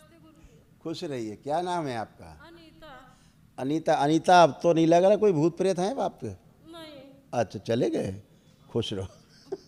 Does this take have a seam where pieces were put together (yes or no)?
no